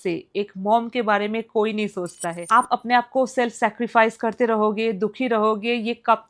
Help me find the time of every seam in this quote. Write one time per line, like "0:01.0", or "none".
0:02.4